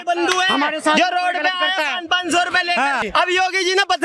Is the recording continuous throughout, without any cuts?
no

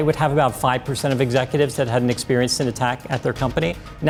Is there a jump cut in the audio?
no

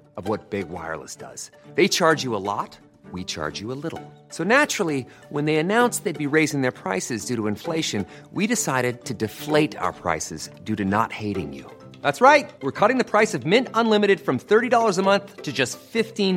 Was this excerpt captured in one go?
yes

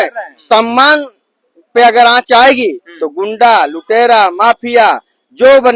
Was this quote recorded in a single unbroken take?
yes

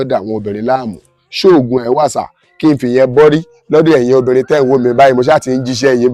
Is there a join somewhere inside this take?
no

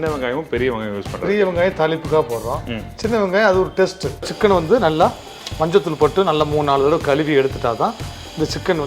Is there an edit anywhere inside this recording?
yes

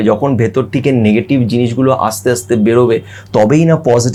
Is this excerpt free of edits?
yes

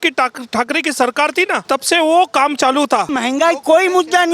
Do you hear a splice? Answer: yes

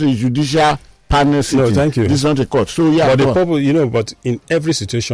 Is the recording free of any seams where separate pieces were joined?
yes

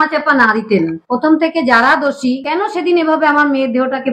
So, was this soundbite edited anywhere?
yes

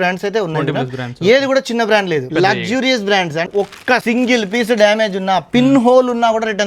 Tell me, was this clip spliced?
yes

